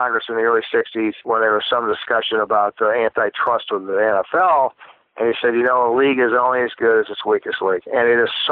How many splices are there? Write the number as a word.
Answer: one